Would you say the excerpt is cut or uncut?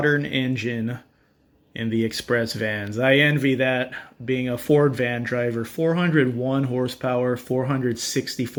uncut